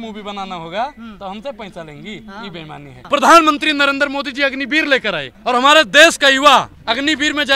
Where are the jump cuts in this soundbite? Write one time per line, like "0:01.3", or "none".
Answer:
0:02.9
0:05.3
0:06.8